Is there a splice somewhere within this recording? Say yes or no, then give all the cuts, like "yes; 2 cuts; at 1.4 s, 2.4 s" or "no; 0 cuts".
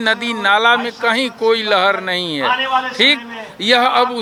no; 0 cuts